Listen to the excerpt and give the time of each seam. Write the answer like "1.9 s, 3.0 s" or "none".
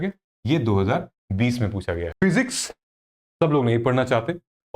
2.1 s